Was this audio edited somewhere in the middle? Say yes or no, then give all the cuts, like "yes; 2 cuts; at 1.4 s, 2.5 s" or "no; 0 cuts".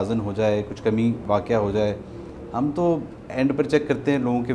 no; 0 cuts